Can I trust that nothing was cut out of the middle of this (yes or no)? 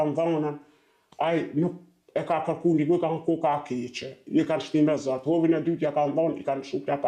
yes